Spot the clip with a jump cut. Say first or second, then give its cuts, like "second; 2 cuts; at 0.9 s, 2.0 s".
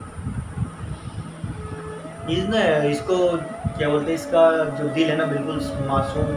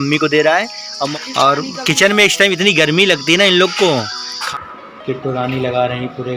second; 2 cuts; at 1.1 s, 4.4 s